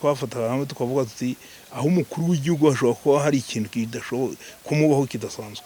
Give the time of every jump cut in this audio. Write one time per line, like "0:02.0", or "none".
none